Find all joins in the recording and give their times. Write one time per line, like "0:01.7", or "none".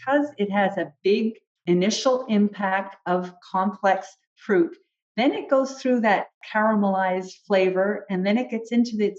0:01.5